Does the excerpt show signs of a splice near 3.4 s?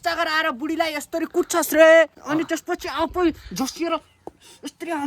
no; 1 cut; at 2.2 s

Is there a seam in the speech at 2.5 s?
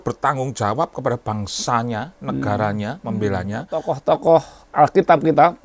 no; 1 cut; at 3.9 s

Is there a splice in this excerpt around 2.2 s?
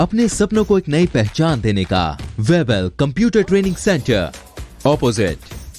yes; 1 cut; at 2.2 s

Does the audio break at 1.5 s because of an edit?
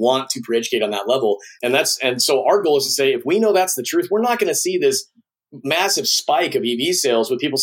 yes; 1 cut; at 1.5 s

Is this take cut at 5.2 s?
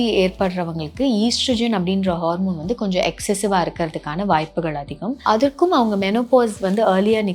yes; 1 cut; at 5.2 s

